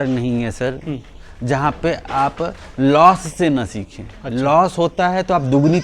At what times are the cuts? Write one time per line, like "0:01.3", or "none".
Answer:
none